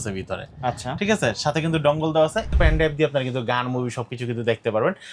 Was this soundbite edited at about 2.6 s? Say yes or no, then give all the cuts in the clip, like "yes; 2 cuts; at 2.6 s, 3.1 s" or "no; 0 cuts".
yes; 1 cut; at 2.6 s